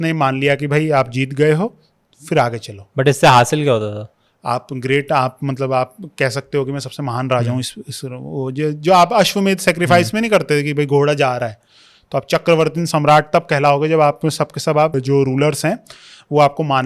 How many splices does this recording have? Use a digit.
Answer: 1